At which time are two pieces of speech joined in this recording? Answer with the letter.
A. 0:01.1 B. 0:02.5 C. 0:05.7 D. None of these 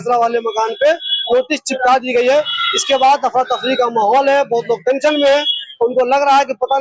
D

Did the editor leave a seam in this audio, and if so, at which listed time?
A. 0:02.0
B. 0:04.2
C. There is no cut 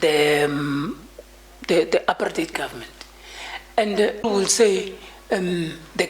B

